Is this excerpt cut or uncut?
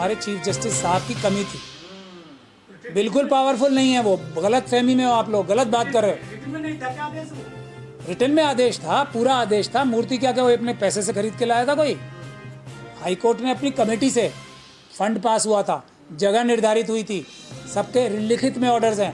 uncut